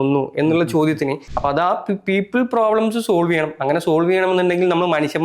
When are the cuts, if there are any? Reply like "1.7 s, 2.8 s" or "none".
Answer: 1.2 s